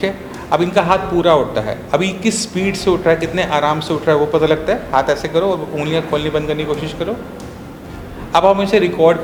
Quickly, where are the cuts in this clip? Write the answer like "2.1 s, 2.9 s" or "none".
none